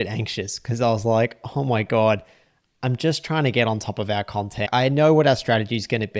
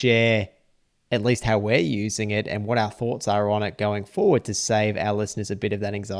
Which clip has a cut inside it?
first; 1 cut; at 4.6 s

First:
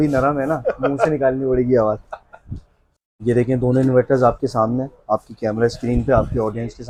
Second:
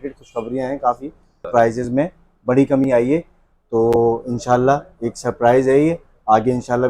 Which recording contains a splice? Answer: second; 1 cut; at 1.5 s

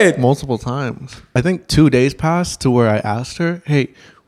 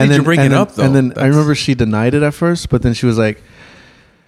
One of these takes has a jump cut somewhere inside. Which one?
first; 1 cut; at 1.3 s

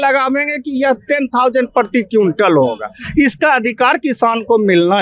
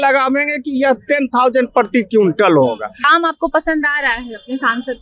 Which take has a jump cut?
second; 1 cut; at 3.1 s

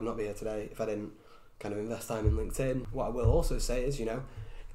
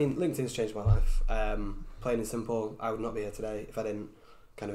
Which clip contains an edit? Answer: first; 1 cut; at 2.9 s

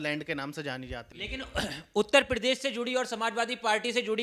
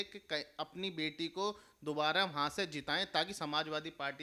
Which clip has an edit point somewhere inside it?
first; 1 cut; at 1.1 s

